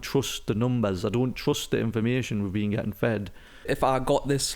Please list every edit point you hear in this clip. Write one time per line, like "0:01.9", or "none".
0:03.7